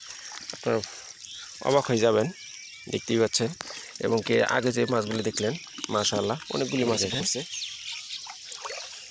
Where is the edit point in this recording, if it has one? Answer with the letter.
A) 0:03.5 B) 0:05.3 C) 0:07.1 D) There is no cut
C